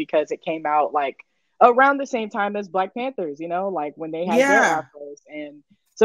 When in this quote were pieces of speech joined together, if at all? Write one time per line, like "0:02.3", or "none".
none